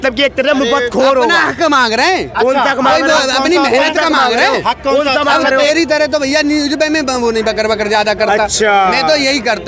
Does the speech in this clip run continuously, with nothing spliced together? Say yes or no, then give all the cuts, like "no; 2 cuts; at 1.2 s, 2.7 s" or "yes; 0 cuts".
yes; 0 cuts